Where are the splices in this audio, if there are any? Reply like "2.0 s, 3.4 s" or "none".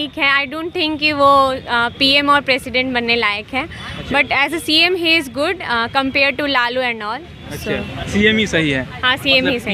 none